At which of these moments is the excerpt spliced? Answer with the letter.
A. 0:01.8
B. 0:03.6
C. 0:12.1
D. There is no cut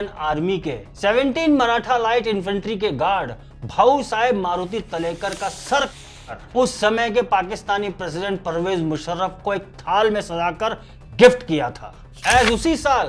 C